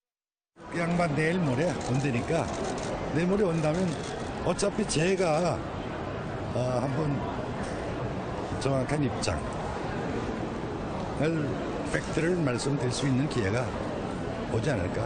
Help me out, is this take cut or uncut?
cut